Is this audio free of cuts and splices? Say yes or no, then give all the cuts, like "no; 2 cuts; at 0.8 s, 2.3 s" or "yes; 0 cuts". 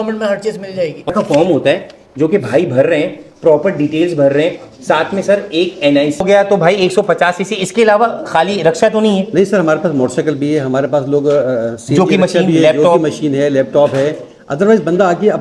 no; 2 cuts; at 1.1 s, 6.2 s